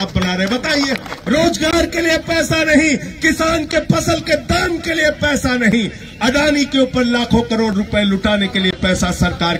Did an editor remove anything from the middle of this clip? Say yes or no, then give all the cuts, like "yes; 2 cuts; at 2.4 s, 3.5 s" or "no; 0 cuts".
yes; 1 cut; at 1.1 s